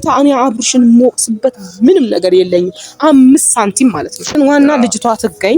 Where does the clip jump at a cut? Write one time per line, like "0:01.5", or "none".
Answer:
0:04.4